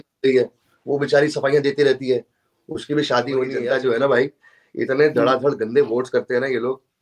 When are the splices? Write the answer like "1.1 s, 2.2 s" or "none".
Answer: 3.6 s